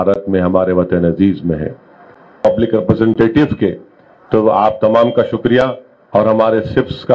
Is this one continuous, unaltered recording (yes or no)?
no